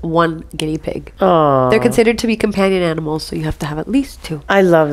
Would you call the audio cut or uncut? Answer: cut